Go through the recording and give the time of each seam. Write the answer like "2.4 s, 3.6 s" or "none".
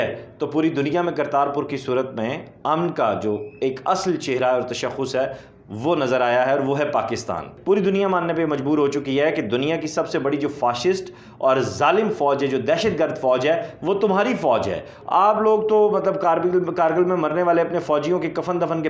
7.5 s, 14.9 s